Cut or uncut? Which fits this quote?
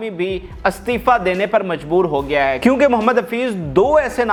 uncut